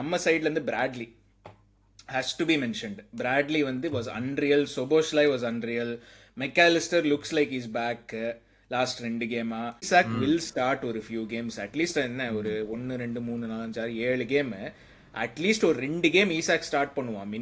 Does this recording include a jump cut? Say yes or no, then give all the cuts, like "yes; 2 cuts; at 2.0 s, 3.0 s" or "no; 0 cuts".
yes; 1 cut; at 9.9 s